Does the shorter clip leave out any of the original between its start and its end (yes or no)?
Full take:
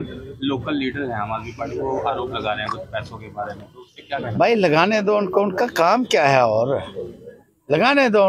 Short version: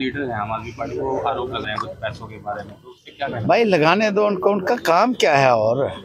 yes